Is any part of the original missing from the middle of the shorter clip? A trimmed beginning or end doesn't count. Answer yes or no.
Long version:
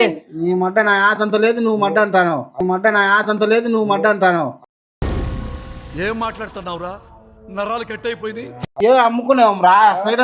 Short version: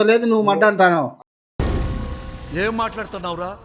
no